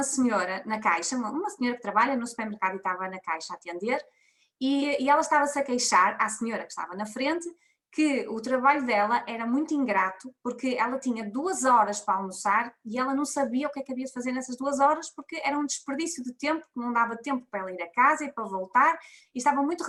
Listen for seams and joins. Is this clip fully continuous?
yes; 0 cuts

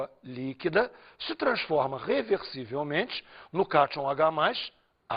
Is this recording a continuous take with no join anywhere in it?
no; 1 cut; at 1.4 s

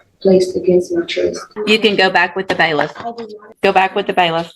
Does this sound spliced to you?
yes; 2 cuts; at 1.5 s, 3.5 s

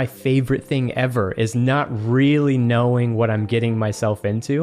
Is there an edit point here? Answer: no; 0 cuts

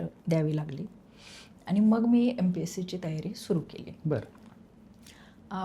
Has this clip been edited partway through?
no; 0 cuts

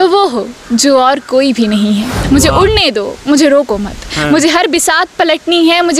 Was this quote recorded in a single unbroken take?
no; 1 cut; at 2.1 s

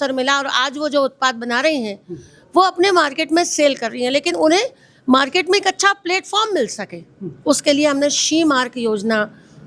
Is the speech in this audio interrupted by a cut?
no; 0 cuts

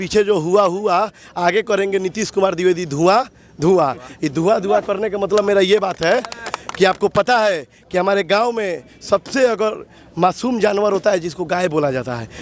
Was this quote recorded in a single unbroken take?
yes; 0 cuts

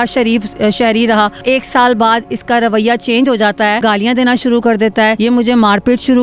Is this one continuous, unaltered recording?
no; 3 cuts; at 1.4 s, 3.8 s, 5.2 s

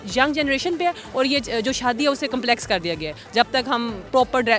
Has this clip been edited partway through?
no; 0 cuts

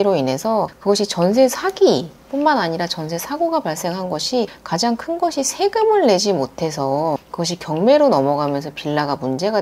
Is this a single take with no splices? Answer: yes; 0 cuts

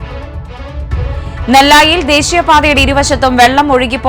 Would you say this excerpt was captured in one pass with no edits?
no; 1 cut; at 1.5 s

